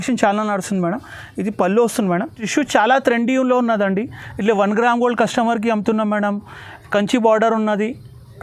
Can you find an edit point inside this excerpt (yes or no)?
yes